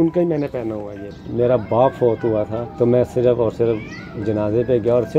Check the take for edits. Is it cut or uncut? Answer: cut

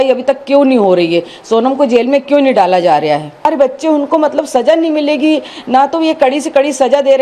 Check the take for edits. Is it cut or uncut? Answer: cut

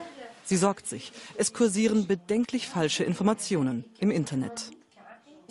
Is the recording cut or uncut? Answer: cut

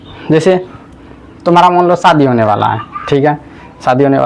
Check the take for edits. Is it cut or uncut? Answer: uncut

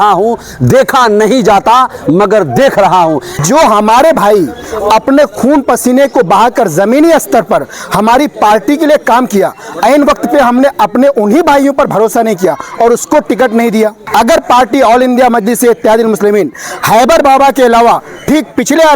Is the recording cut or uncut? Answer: cut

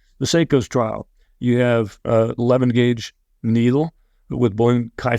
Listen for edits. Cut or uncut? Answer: uncut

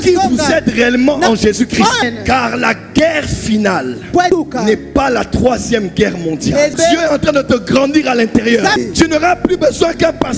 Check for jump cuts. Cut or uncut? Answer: cut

